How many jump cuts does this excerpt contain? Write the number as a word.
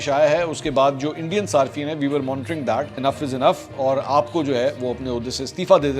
one